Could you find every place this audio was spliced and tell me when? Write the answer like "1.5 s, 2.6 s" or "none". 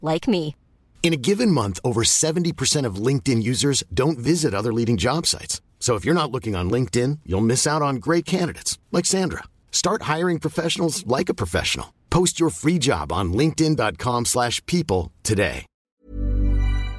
15.7 s